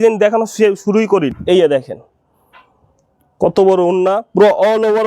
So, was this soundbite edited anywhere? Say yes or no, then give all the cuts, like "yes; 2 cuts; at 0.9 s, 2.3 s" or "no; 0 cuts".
yes; 1 cut; at 1.3 s